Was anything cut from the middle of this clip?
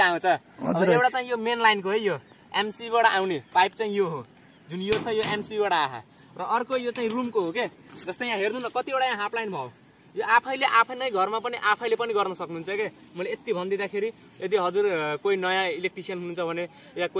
no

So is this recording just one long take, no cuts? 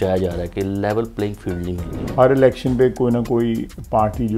no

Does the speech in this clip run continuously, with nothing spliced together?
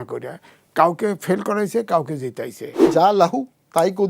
no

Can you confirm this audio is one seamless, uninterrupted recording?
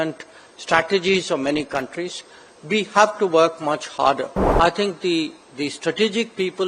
no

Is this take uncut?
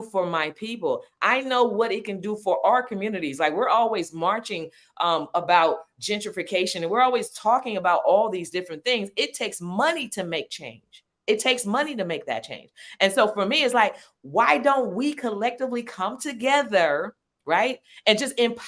yes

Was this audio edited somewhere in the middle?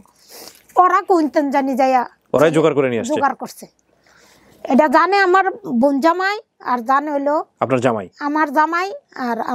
no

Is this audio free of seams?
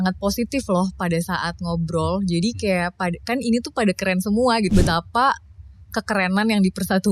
no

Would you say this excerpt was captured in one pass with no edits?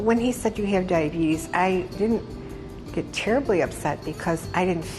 no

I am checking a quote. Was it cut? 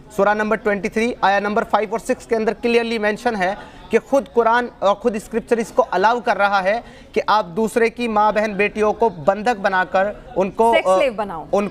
no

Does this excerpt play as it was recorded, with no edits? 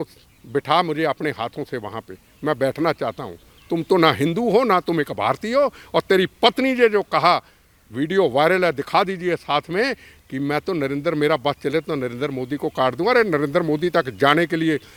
yes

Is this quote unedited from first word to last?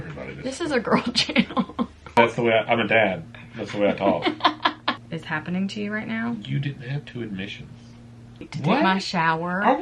no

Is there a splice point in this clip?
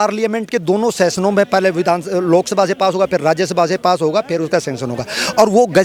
no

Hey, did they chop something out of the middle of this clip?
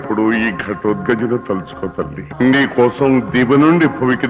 yes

